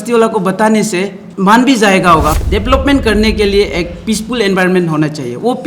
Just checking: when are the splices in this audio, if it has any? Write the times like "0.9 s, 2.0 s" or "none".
1.2 s, 2.4 s